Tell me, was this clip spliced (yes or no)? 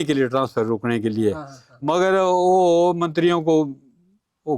no